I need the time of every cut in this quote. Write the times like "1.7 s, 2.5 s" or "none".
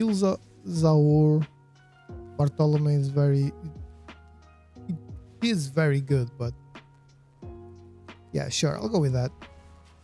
none